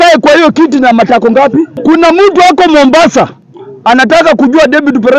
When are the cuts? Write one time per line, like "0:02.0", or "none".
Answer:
0:01.7